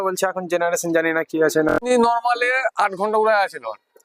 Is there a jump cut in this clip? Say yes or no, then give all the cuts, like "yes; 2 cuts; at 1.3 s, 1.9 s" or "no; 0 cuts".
yes; 1 cut; at 1.9 s